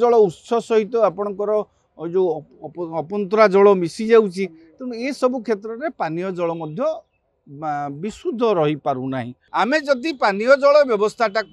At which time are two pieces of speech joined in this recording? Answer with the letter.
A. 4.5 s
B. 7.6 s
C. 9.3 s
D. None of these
C